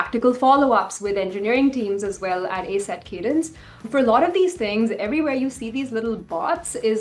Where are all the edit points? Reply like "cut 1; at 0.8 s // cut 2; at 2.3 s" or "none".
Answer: cut 1; at 3.9 s